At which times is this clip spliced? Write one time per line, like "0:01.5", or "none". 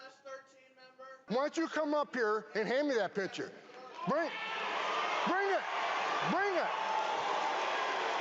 0:01.2